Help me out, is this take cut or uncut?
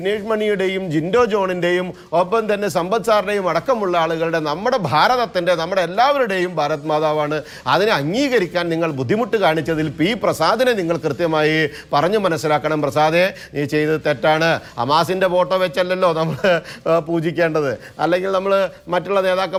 uncut